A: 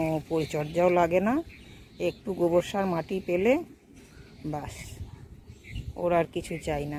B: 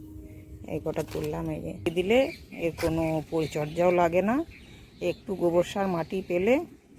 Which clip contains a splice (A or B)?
B